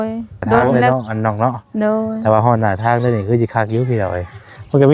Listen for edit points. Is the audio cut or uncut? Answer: cut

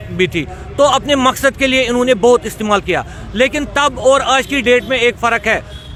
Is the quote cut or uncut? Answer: uncut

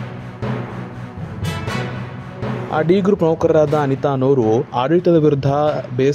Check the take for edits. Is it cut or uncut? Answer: cut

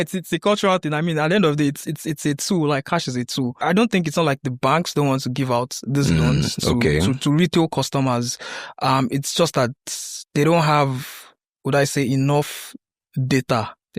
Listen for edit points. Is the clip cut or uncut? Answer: cut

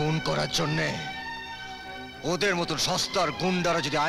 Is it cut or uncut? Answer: uncut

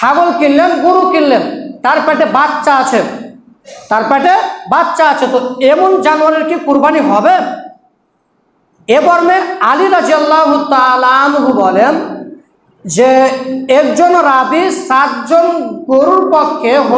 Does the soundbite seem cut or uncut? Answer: uncut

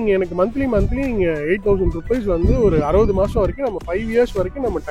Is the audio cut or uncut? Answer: uncut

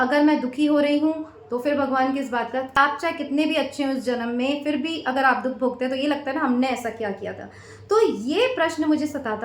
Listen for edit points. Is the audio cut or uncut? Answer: cut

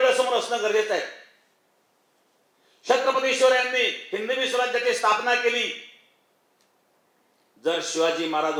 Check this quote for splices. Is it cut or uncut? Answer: uncut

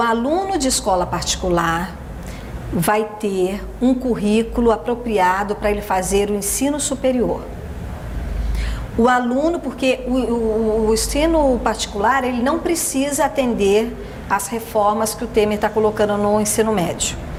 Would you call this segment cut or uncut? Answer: uncut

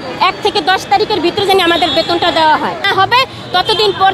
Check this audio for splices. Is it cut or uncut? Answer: cut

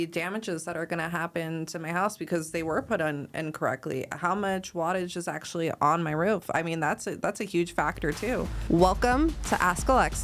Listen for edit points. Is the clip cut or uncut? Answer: cut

